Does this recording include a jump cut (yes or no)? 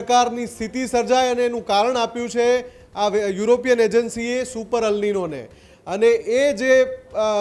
no